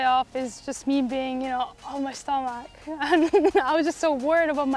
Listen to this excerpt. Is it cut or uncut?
uncut